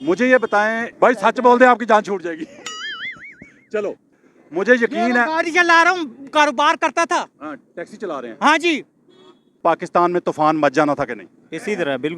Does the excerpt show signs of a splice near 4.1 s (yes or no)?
yes